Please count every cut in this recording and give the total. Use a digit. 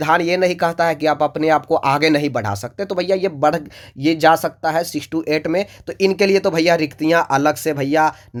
0